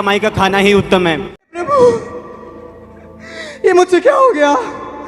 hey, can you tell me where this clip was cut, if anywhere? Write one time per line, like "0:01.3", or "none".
0:01.5